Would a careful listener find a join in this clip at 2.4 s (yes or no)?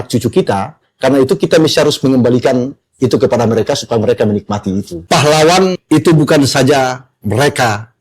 no